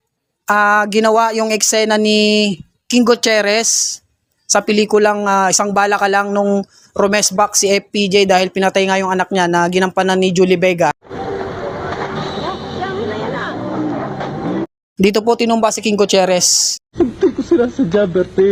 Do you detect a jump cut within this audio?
no; 0 cuts

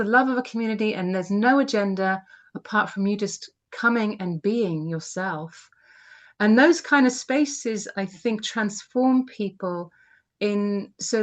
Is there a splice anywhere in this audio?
no; 0 cuts

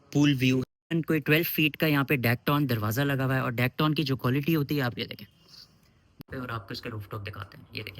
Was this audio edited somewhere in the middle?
yes; 2 cuts; at 0.9 s, 6.2 s

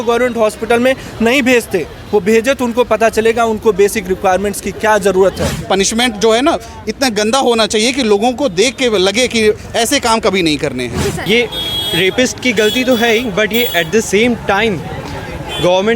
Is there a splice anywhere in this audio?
yes; 2 cuts; at 5.6 s, 11.2 s

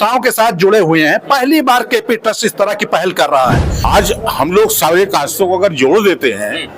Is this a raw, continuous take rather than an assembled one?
no; 1 cut; at 3.7 s

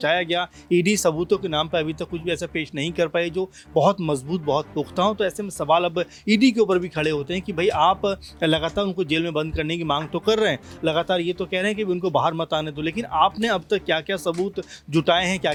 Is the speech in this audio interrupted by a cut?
no; 0 cuts

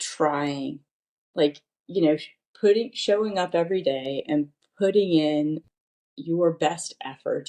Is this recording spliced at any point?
no; 0 cuts

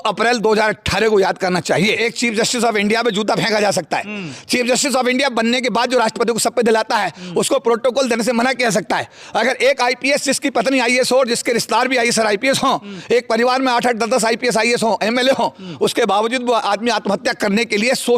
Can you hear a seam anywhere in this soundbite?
yes; 1 cut; at 2.0 s

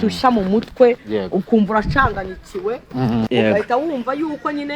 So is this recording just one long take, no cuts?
no; 1 cut; at 3.3 s

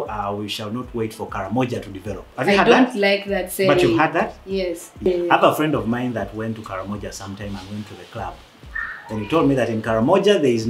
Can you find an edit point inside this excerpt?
yes; 1 cut; at 5.1 s

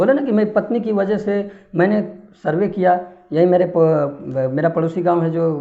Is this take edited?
no; 0 cuts

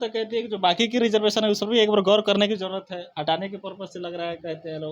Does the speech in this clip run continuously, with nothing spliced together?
yes; 0 cuts

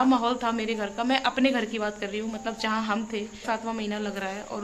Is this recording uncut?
no; 1 cut; at 3.4 s

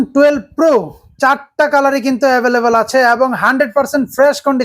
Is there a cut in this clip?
no; 0 cuts

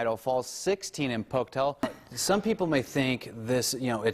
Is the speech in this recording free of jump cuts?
no; 1 cut; at 1.8 s

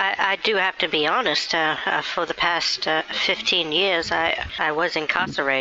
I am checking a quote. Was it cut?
yes; 1 cut; at 4.5 s

